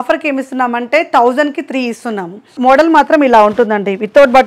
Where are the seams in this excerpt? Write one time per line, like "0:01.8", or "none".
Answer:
0:02.5